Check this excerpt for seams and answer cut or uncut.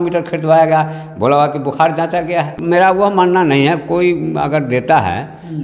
cut